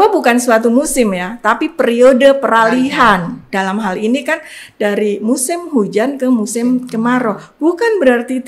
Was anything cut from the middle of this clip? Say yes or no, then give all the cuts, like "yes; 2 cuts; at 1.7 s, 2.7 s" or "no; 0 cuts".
no; 0 cuts